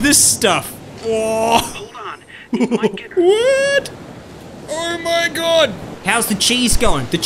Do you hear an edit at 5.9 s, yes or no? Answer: yes